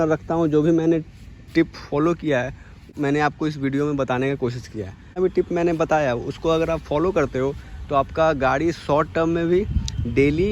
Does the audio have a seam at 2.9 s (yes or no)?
yes